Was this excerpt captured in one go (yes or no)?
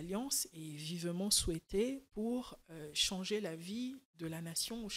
yes